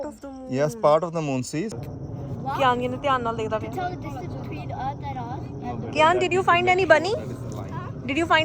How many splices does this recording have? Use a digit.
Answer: 1